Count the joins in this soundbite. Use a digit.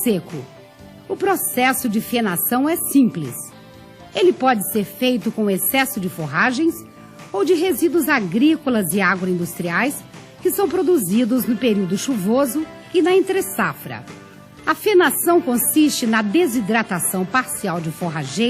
1